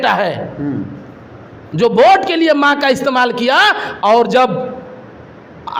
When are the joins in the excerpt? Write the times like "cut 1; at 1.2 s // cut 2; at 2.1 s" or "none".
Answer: none